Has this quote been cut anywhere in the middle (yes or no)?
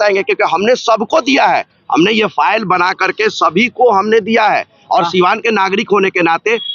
no